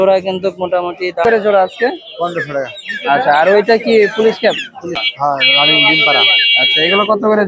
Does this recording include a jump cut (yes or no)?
yes